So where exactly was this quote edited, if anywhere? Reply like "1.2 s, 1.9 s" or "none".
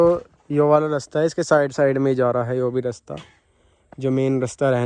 none